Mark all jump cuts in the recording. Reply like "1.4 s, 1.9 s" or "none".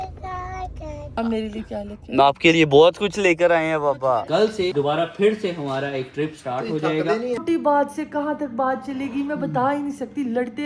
4.2 s, 7.4 s